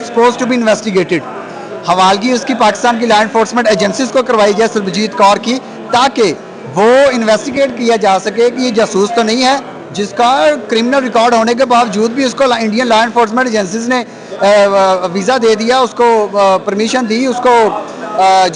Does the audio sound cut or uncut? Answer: uncut